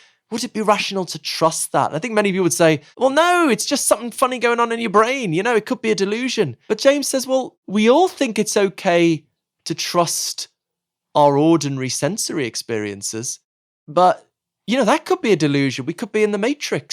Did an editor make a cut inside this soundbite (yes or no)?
yes